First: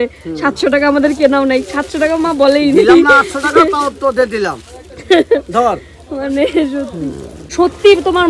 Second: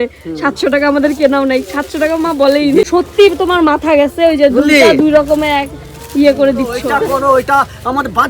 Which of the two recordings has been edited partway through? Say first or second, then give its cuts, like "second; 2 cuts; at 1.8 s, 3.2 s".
second; 2 cuts; at 2.8 s, 6.9 s